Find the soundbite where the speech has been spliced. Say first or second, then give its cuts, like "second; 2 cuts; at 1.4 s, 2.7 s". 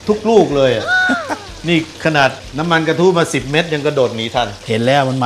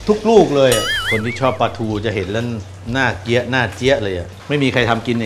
second; 2 cuts; at 0.9 s, 4.3 s